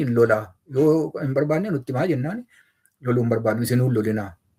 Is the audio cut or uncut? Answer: uncut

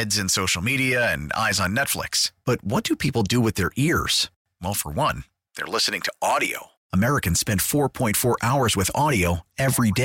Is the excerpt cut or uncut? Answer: uncut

